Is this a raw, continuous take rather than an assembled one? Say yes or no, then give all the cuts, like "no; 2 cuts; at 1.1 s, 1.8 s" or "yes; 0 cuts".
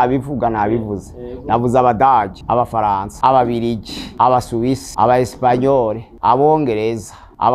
yes; 0 cuts